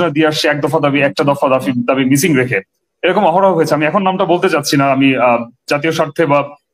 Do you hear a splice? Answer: no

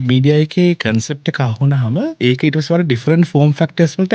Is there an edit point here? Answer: yes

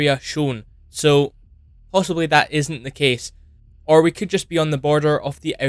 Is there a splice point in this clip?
no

